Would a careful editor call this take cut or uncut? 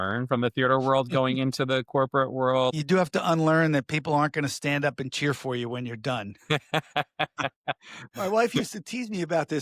cut